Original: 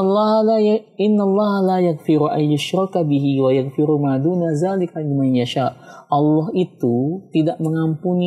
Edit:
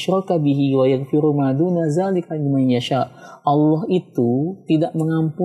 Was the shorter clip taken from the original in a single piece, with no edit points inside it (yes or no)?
yes